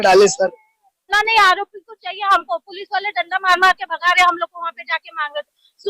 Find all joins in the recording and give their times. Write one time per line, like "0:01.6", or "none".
0:01.2